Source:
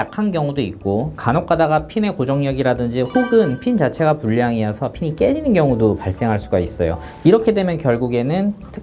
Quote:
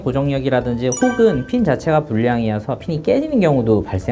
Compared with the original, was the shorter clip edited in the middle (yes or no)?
no